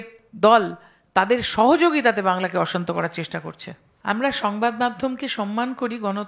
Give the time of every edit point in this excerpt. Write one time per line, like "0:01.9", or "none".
none